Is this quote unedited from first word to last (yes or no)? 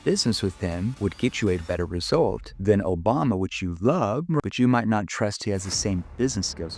no